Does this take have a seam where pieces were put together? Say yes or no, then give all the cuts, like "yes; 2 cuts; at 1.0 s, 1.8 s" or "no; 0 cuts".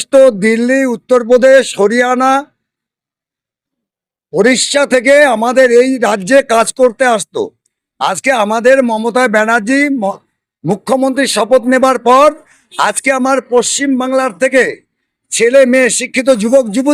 no; 0 cuts